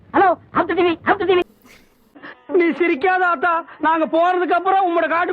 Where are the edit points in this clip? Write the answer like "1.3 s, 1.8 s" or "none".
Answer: 1.5 s